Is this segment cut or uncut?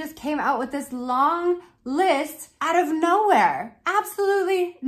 uncut